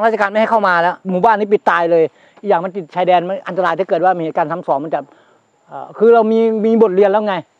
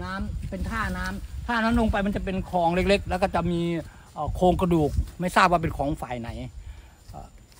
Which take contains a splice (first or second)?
first